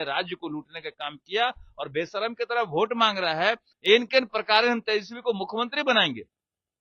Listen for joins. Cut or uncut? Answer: cut